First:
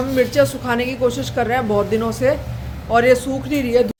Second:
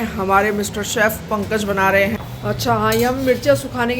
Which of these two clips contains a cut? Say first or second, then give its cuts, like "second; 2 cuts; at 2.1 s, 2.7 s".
second; 1 cut; at 2.2 s